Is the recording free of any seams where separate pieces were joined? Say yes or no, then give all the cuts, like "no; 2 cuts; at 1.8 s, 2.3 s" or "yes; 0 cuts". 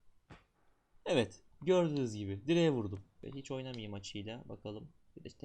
no; 1 cut; at 3.1 s